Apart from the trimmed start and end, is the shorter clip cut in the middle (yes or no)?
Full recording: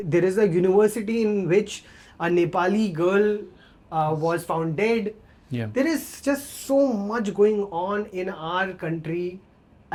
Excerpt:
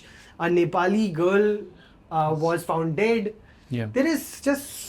no